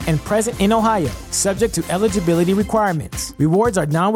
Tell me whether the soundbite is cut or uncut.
uncut